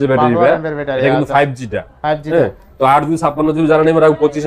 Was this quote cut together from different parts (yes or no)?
no